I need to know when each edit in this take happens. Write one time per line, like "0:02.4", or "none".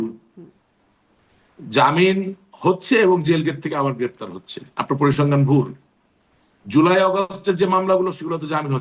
none